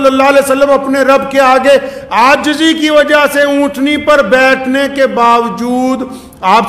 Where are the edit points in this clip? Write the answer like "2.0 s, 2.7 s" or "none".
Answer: none